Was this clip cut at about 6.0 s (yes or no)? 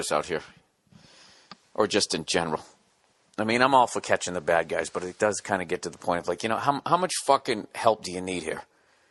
no